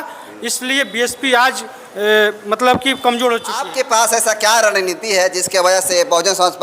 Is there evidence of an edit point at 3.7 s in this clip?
yes; 1 cut; at 3.7 s

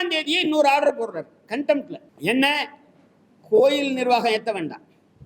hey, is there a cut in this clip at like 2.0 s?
yes; 1 cut; at 2.0 s

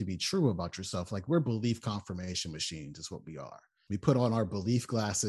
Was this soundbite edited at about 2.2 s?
no; 1 cut; at 3.7 s

